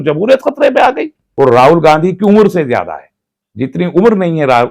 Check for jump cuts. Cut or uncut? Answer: cut